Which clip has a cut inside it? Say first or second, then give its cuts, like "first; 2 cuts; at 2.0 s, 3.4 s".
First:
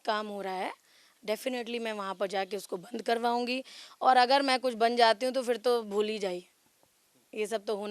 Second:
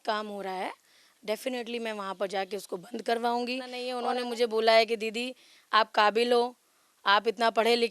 second; 1 cut; at 3.8 s